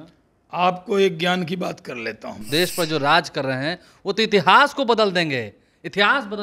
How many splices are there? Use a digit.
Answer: 1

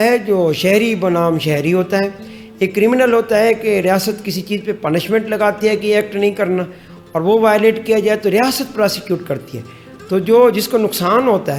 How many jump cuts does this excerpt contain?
0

